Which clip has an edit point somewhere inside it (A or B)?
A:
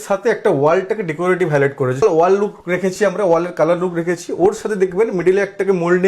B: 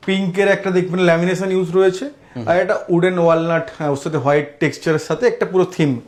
A